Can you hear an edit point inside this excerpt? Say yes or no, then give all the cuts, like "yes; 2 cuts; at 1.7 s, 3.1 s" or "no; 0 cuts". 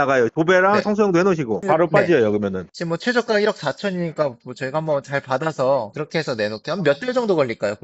no; 0 cuts